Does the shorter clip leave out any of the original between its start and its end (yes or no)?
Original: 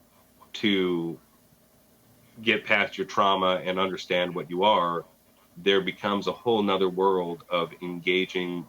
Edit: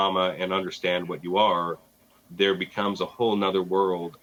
no